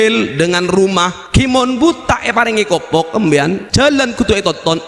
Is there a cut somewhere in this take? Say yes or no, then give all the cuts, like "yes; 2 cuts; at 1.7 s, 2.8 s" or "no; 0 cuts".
yes; 2 cuts; at 1.2 s, 3.6 s